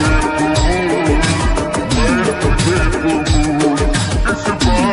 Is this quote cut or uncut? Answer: uncut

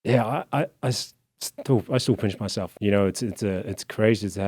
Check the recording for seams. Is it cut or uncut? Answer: cut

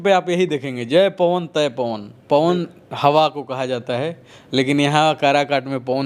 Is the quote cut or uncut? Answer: uncut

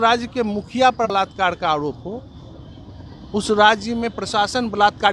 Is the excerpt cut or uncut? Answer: cut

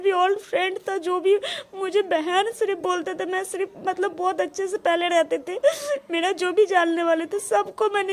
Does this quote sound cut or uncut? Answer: uncut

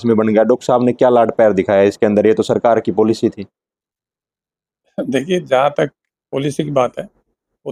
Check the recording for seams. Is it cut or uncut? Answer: uncut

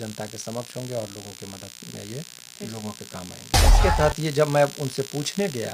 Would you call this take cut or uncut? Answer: cut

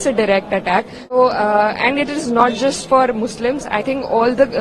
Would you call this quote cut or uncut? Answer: cut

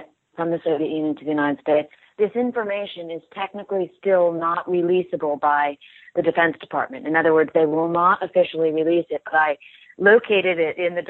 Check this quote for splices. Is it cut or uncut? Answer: cut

